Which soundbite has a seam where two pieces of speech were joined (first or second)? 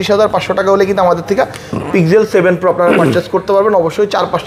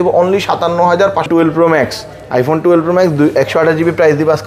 second